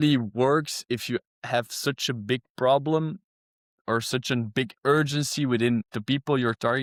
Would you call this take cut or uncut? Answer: uncut